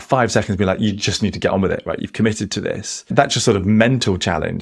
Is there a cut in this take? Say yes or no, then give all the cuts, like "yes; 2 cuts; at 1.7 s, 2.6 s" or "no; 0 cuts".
yes; 1 cut; at 2.9 s